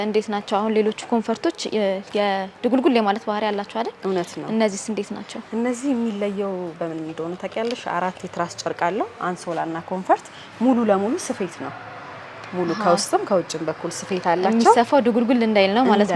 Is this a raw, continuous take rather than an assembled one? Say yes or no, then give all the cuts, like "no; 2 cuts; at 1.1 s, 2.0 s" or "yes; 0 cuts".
yes; 0 cuts